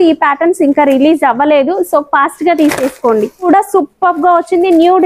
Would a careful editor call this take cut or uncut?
cut